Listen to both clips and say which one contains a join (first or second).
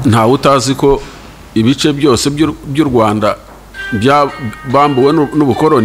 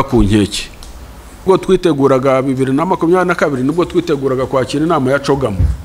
second